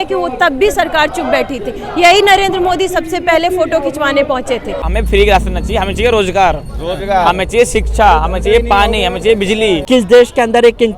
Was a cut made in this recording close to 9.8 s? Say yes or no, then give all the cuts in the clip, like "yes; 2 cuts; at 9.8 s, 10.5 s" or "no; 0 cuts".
yes; 2 cuts; at 4.9 s, 9.8 s